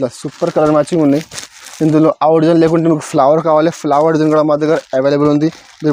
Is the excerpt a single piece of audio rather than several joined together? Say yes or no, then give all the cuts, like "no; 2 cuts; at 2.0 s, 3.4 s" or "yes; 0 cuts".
yes; 0 cuts